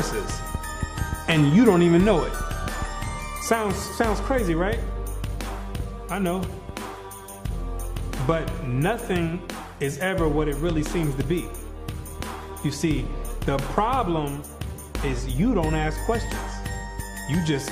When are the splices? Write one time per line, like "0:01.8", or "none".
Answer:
0:01.8